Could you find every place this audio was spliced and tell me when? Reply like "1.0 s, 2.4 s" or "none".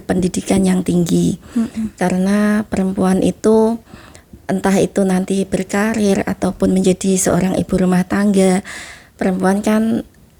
none

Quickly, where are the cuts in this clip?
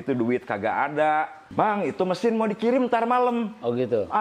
1.4 s

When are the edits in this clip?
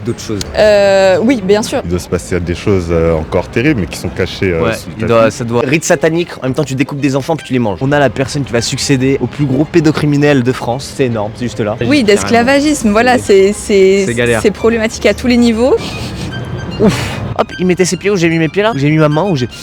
1.8 s, 5.6 s, 7.8 s, 9.2 s, 11.8 s, 15.9 s, 17.2 s

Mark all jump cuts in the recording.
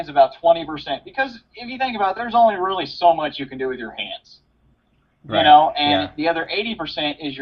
none

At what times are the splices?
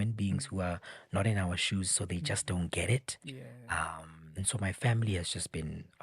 none

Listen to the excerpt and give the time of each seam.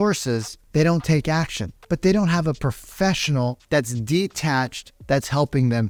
none

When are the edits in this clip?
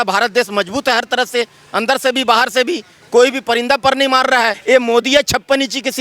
4.6 s

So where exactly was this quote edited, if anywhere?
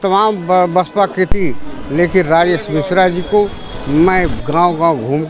none

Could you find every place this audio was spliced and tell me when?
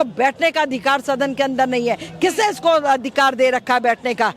none

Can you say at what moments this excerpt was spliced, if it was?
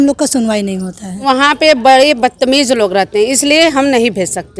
1.2 s

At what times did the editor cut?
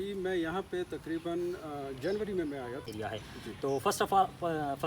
2.9 s

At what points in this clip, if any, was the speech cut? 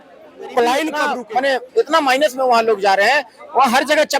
1.1 s

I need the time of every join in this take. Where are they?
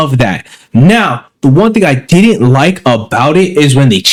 none

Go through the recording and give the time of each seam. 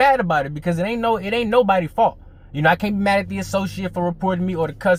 none

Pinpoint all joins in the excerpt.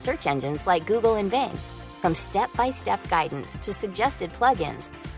none

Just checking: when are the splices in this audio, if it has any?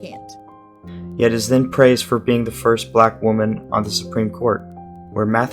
1.2 s

